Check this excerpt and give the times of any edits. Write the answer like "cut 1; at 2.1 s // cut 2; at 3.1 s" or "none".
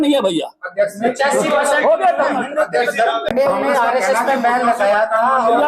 cut 1; at 3.3 s